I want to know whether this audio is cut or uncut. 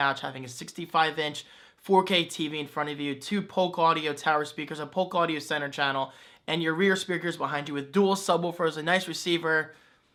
uncut